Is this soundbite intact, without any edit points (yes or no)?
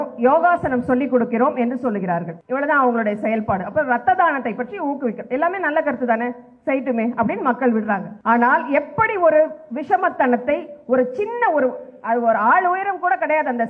no